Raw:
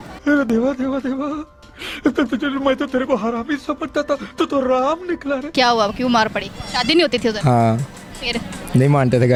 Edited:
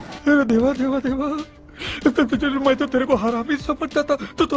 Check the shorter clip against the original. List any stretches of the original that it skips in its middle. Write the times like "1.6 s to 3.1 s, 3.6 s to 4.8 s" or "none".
none